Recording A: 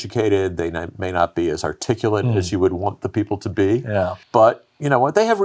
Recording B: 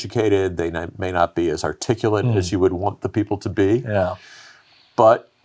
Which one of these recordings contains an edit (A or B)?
A